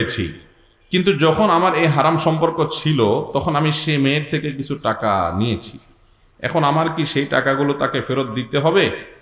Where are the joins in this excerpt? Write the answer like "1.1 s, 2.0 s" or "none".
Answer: none